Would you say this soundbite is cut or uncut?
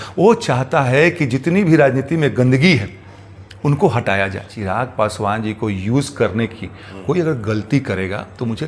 cut